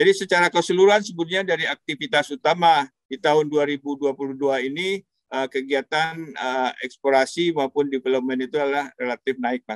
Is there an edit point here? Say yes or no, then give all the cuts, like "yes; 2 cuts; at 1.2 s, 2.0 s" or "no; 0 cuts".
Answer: no; 0 cuts